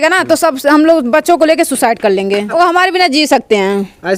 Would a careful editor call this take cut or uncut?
cut